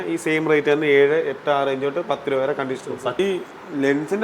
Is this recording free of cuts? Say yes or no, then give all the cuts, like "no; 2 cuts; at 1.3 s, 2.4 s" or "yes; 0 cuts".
no; 1 cut; at 3.2 s